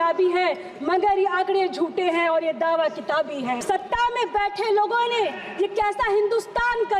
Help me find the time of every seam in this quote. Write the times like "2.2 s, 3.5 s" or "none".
3.6 s

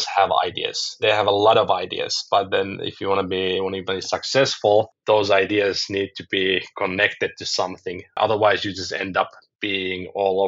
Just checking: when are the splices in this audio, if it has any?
1.0 s, 8.2 s

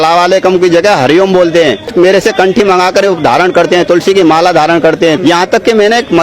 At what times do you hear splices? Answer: 1.9 s, 5.2 s

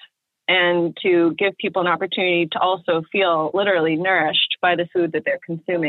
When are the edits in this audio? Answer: none

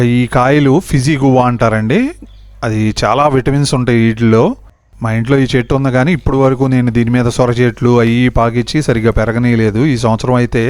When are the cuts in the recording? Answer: none

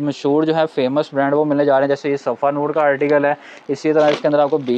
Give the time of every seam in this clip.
none

